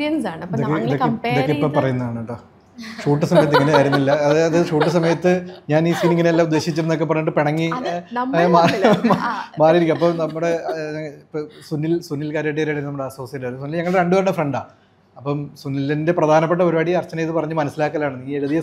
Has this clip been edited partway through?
no; 0 cuts

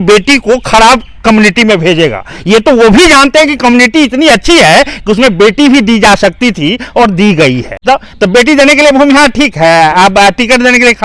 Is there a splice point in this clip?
yes; 1 cut; at 7.7 s

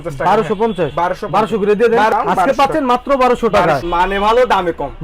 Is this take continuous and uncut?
no; 1 cut; at 3.8 s

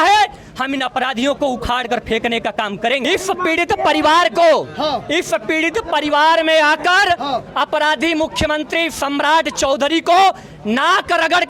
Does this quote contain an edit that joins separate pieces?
yes; 1 cut; at 3.1 s

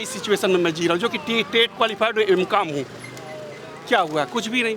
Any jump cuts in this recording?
no; 0 cuts

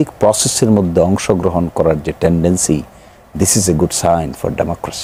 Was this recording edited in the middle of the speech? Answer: no; 0 cuts

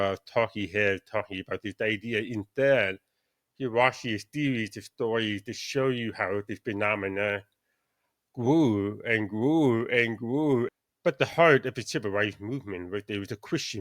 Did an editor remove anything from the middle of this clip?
yes; 1 cut; at 10.7 s

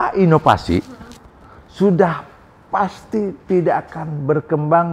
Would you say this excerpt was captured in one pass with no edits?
yes; 0 cuts

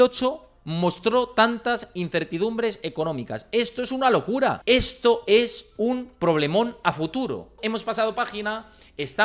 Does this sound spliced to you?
yes; 2 cuts; at 4.6 s, 7.7 s

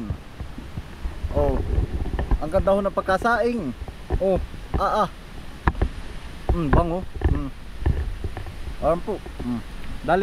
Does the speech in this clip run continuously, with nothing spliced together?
yes; 0 cuts

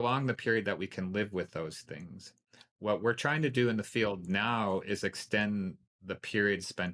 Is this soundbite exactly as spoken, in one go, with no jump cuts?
yes; 0 cuts

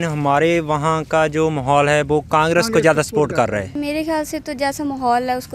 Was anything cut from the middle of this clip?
yes; 1 cut; at 3.8 s

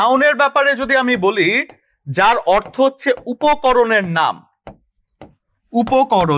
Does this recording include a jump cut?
no; 0 cuts

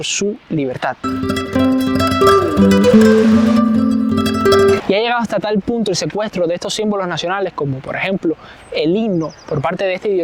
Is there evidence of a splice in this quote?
no; 0 cuts

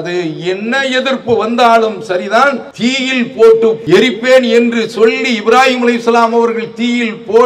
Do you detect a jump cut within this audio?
yes; 2 cuts; at 2.7 s, 3.8 s

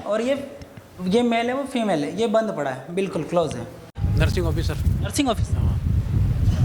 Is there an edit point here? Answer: yes; 1 cut; at 4.0 s

